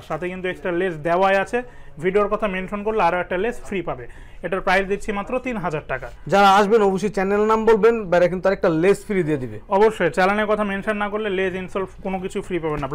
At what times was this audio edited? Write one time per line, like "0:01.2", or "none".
none